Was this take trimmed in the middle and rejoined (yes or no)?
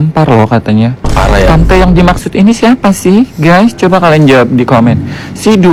no